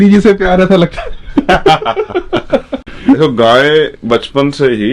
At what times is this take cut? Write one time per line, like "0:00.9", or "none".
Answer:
none